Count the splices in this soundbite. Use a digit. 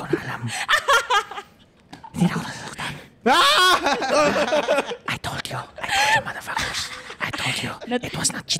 1